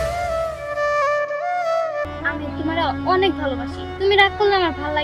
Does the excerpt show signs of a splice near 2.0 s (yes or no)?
yes